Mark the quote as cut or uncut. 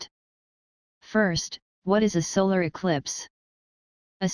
cut